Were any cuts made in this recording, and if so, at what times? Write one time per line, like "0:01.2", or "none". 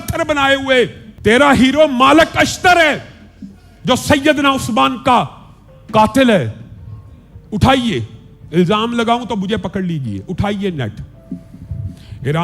0:01.0